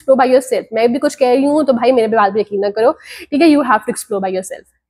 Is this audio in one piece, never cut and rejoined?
yes; 0 cuts

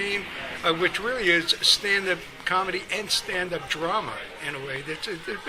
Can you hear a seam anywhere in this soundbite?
yes; 1 cut; at 3.0 s

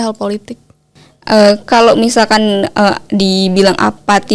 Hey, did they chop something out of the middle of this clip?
no; 0 cuts

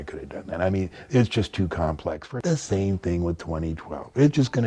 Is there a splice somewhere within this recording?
yes; 1 cut; at 2.2 s

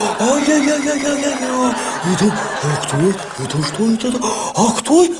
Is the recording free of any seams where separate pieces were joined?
yes; 0 cuts

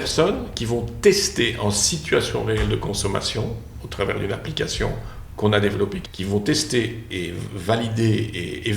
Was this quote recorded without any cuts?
no; 2 cuts; at 6.1 s, 7.1 s

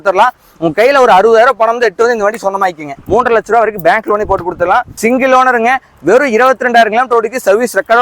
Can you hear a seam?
yes; 2 cuts; at 2.9 s, 4.9 s

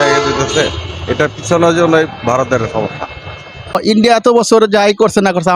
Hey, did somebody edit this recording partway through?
yes; 1 cut; at 3.8 s

